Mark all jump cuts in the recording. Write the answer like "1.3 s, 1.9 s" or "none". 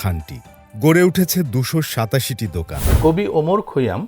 2.8 s